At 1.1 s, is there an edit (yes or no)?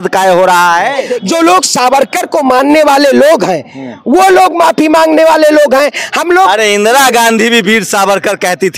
yes